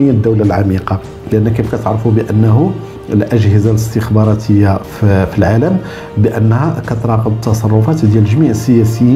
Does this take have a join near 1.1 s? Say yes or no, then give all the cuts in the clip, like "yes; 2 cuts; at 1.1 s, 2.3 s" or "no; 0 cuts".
yes; 1 cut; at 1.1 s